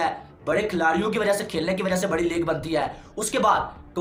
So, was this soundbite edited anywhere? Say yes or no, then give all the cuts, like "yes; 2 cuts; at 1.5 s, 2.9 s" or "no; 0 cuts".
no; 0 cuts